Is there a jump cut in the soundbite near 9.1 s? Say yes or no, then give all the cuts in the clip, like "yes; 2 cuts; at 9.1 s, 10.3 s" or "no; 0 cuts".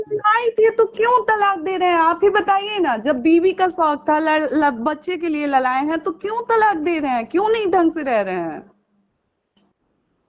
no; 0 cuts